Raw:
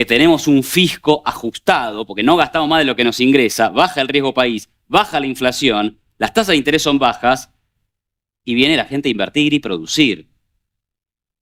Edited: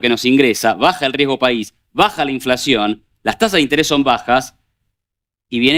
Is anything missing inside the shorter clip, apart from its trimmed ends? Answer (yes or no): no